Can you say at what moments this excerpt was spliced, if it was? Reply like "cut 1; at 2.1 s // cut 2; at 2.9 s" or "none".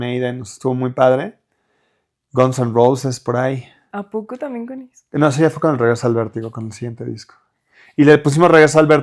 none